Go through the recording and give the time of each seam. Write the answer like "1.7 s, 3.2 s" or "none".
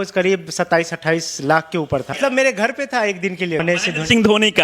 2.2 s, 3.6 s